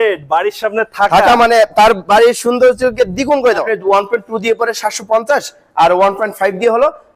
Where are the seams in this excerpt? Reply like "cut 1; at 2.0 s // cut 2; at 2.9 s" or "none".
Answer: cut 1; at 3.6 s